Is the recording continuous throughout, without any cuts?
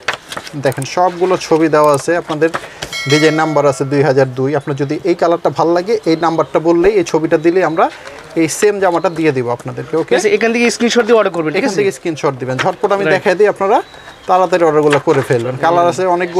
yes; 0 cuts

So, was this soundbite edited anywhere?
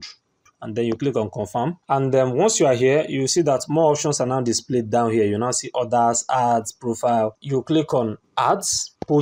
no; 0 cuts

